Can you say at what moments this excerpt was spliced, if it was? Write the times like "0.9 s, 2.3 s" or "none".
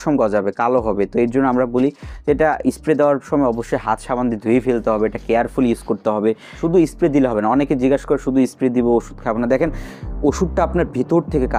none